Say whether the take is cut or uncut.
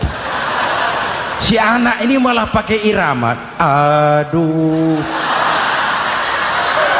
uncut